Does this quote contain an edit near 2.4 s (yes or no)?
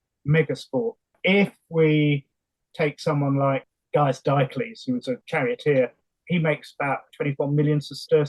no